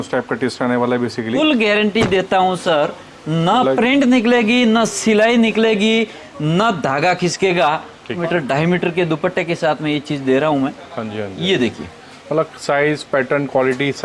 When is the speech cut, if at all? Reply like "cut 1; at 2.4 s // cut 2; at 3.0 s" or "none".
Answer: cut 1; at 1.4 s // cut 2; at 8.2 s